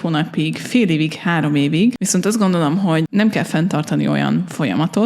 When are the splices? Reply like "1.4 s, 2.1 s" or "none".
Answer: 2.0 s, 3.1 s